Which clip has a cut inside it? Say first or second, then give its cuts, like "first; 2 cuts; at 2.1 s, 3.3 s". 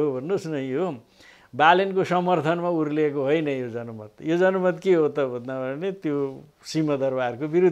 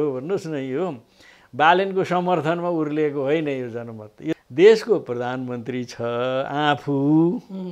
second; 1 cut; at 4.3 s